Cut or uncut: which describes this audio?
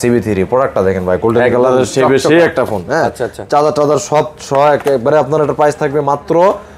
uncut